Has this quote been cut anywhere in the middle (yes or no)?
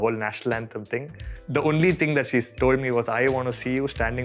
no